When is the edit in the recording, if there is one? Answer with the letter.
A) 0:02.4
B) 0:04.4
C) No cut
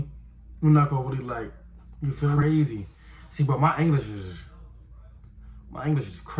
A